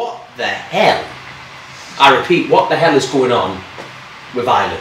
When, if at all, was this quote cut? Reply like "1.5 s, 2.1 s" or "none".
none